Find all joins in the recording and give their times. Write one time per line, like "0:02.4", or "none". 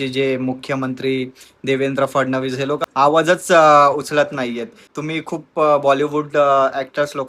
none